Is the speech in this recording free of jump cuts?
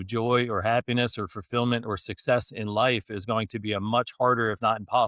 yes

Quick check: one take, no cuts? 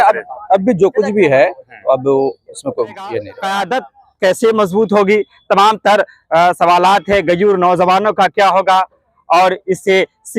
no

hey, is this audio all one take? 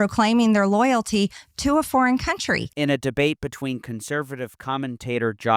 yes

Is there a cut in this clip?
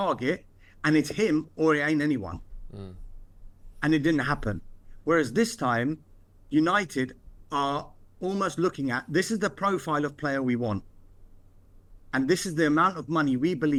no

